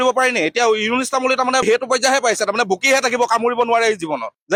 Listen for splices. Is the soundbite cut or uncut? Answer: uncut